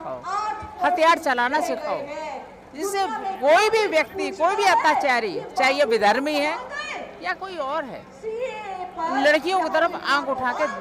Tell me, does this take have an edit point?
no; 0 cuts

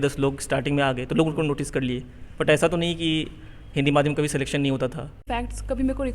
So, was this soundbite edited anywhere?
yes; 1 cut; at 5.2 s

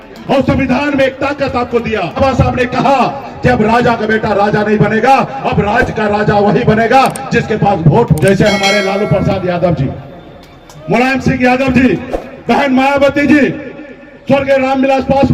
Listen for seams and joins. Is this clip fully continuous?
no; 2 cuts; at 2.2 s, 8.2 s

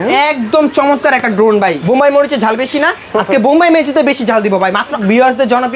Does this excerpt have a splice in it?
yes; 2 cuts; at 1.8 s, 5.0 s

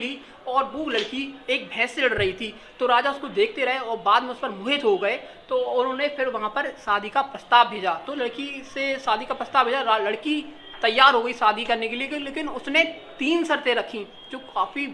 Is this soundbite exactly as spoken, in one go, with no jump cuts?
yes; 0 cuts

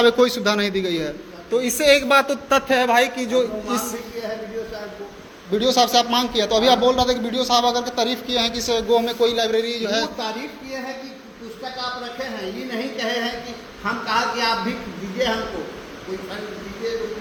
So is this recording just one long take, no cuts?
yes; 0 cuts

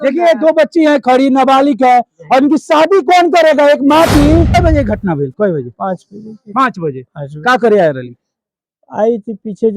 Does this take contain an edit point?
yes; 1 cut; at 4.6 s

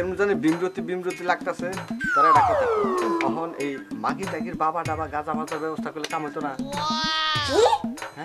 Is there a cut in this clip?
no; 0 cuts

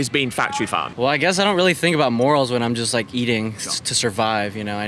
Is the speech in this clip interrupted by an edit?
yes; 1 cut; at 0.9 s

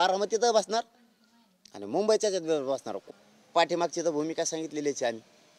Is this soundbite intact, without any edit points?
no; 1 cut; at 3.0 s

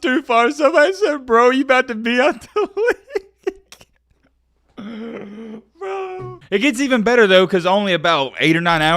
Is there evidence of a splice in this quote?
yes; 1 cut; at 6.3 s

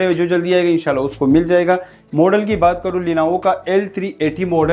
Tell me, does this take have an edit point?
yes; 1 cut; at 2.0 s

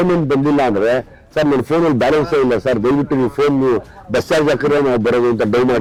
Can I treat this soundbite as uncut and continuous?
yes; 0 cuts

